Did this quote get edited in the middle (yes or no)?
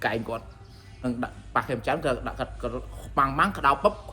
yes